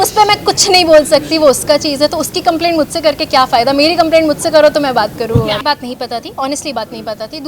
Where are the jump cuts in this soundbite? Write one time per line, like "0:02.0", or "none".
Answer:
0:05.6